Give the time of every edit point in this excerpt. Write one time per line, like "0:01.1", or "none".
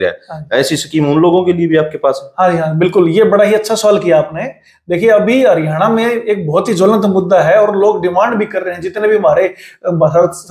none